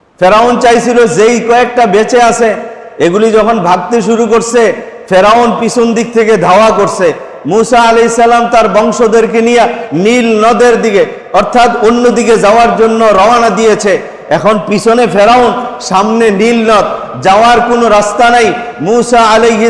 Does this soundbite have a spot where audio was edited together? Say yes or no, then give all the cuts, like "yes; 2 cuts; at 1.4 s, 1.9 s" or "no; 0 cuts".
no; 0 cuts